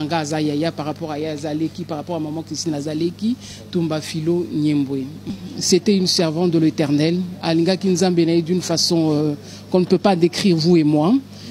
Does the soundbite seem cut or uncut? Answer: cut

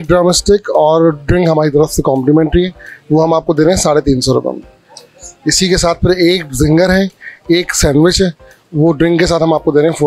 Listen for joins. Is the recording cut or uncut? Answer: uncut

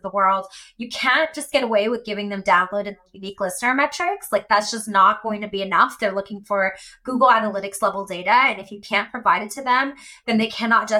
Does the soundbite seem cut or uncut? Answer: uncut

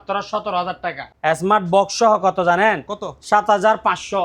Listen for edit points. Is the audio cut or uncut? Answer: cut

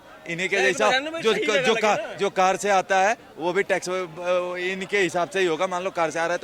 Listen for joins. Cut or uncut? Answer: uncut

